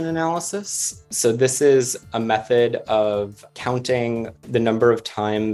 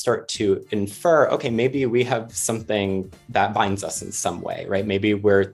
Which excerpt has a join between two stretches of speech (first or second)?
first